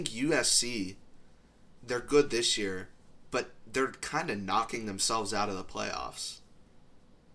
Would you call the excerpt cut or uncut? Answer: uncut